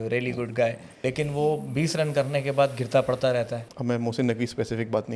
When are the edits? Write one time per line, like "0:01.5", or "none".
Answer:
0:00.9
0:03.7